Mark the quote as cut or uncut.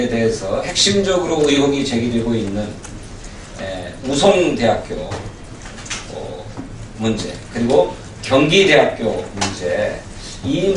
cut